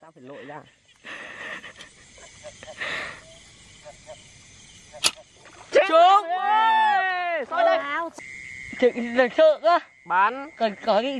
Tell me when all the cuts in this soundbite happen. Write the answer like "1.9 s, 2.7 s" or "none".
8.0 s